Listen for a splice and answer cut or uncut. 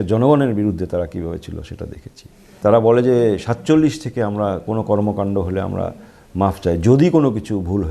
cut